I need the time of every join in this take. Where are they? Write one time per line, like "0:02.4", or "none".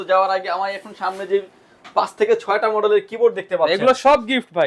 none